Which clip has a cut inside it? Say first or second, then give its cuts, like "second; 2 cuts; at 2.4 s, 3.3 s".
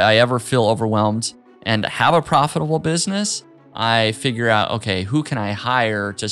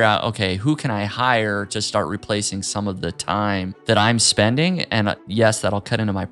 second; 2 cuts; at 3.7 s, 5.2 s